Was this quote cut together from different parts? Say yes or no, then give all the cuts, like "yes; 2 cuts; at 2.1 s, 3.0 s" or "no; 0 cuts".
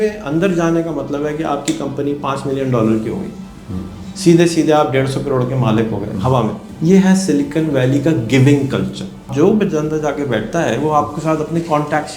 yes; 2 cuts; at 6.7 s, 9.3 s